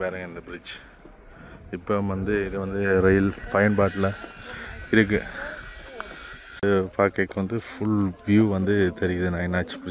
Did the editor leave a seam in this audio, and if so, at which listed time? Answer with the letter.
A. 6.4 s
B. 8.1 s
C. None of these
A